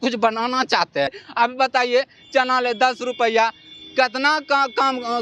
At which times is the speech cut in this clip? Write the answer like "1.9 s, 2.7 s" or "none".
1.1 s